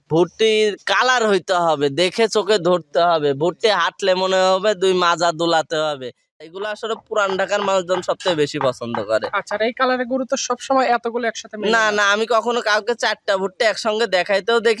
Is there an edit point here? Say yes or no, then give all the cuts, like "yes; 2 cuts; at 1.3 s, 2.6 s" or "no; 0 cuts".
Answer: yes; 1 cut; at 6.5 s